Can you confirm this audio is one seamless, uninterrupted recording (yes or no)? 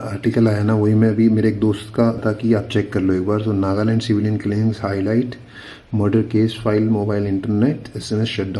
no